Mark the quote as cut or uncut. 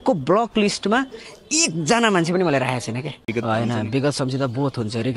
cut